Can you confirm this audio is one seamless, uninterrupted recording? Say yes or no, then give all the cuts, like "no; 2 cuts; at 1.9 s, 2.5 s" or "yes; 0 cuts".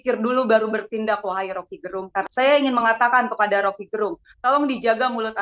no; 1 cut; at 2.2 s